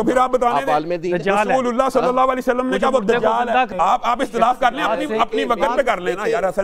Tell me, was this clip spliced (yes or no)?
yes